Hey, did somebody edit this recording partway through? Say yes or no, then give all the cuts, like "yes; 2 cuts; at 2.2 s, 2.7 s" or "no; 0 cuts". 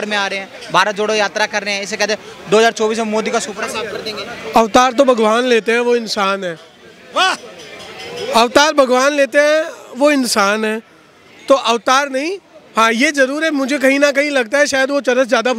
no; 0 cuts